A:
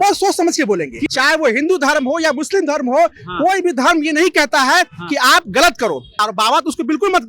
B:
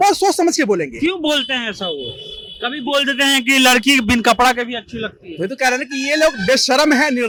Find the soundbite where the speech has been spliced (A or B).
A